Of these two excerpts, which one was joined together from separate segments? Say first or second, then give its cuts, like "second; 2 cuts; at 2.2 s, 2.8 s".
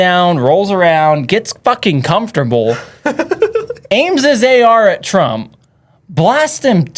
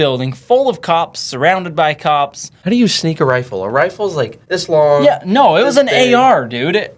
second; 2 cuts; at 2.5 s, 4.4 s